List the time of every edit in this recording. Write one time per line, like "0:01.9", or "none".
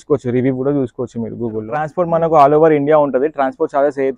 0:01.9